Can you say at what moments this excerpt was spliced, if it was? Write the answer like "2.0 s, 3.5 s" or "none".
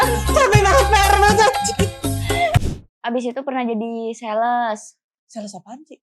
2.6 s